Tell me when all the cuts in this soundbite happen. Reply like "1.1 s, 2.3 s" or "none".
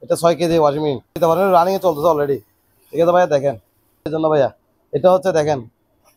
1.1 s, 4.0 s